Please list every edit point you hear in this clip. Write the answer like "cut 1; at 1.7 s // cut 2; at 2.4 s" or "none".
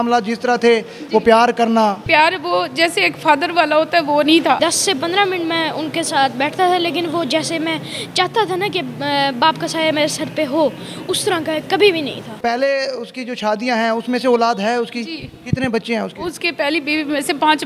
cut 1; at 2.0 s // cut 2; at 4.6 s // cut 3; at 12.3 s